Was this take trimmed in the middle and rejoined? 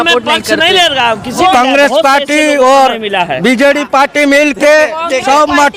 yes; 1 cut; at 1.5 s

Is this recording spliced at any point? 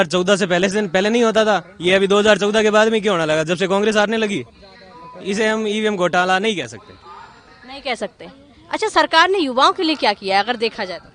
no; 0 cuts

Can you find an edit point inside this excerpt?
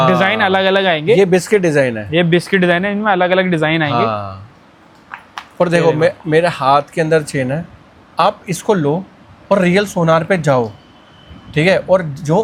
no; 0 cuts

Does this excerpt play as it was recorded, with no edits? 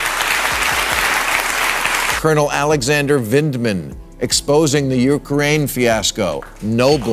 no; 1 cut; at 1.8 s

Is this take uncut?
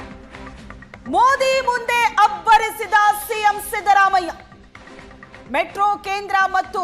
no; 1 cut; at 0.9 s

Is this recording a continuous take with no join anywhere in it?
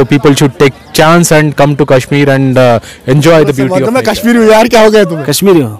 no; 1 cut; at 3.8 s

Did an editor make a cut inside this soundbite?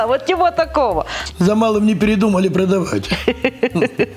yes; 1 cut; at 1.2 s

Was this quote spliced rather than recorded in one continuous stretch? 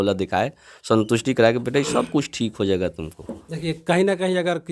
no; 0 cuts

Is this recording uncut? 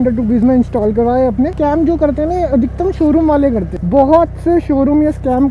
no; 2 cuts; at 1.5 s, 3.7 s

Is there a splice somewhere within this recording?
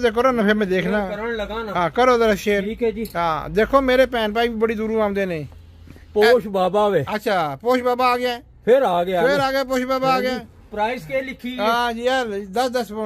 no; 0 cuts

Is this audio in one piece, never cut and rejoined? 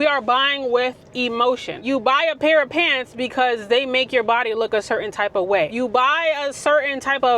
no; 2 cuts; at 1.8 s, 5.7 s

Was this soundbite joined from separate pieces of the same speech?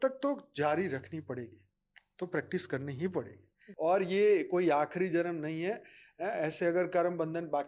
yes; 1 cut; at 3.6 s

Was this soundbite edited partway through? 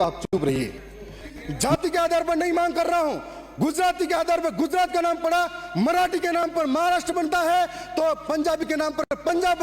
yes; 1 cut; at 1.4 s

